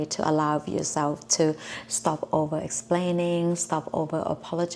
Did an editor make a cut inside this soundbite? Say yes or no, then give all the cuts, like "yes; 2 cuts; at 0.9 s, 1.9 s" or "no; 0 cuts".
no; 0 cuts